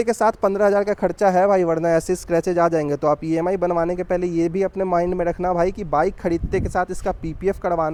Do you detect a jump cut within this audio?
no; 0 cuts

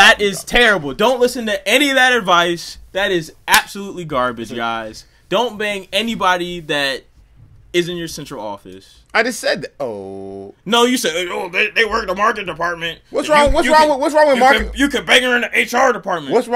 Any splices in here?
no; 0 cuts

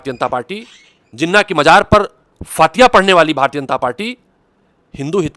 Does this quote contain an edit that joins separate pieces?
no; 0 cuts

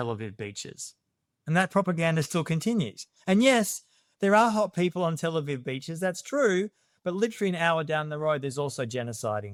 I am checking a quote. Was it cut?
no; 0 cuts

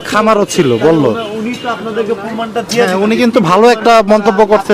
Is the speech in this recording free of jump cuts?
yes; 0 cuts

